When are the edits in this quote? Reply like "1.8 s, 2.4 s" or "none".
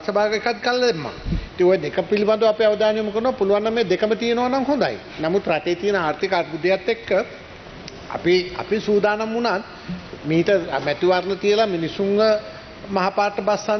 none